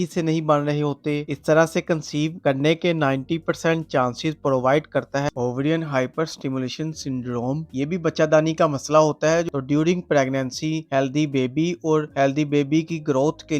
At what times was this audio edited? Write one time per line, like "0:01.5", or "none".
0:01.3
0:05.3
0:09.5